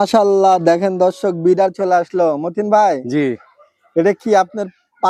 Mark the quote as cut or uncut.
uncut